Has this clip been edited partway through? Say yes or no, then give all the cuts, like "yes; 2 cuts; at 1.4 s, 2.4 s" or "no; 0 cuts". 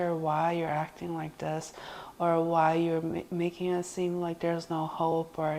no; 0 cuts